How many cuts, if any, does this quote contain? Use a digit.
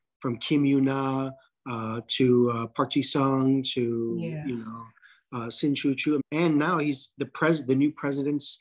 1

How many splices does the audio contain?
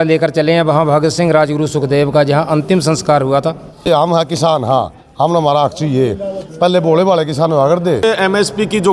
2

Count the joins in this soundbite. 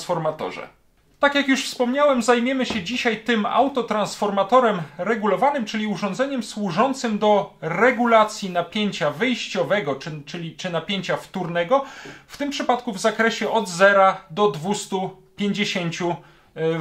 0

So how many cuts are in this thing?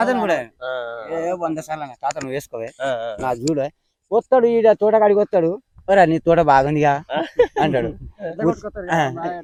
0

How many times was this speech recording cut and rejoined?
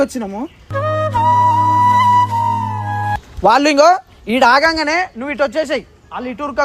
1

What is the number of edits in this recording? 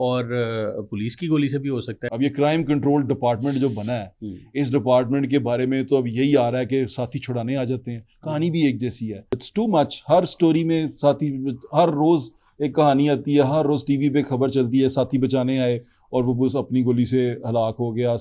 2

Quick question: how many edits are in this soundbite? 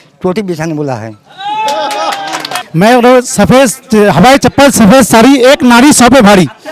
1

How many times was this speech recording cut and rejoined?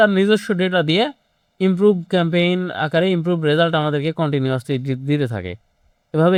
0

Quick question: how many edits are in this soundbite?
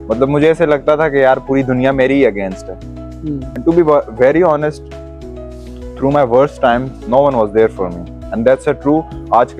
0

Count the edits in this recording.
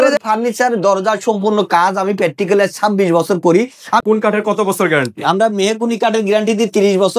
1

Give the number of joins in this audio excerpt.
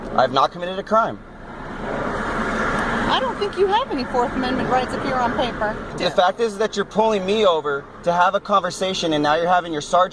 1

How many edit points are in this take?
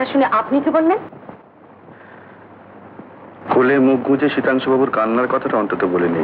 0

